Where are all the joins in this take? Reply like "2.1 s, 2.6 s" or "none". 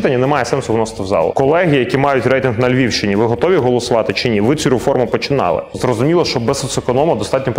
1.3 s, 5.8 s